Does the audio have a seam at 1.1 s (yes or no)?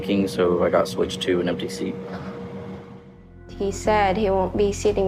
no